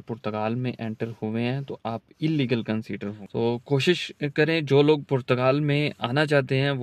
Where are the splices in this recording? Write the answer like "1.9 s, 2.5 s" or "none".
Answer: 3.2 s